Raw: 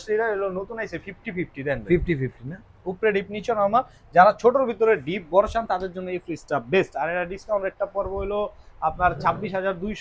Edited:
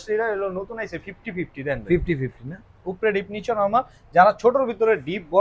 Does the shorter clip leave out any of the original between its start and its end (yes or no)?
no